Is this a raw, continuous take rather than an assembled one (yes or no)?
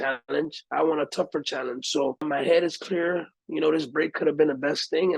no